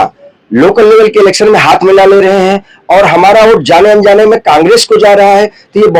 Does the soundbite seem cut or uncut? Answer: uncut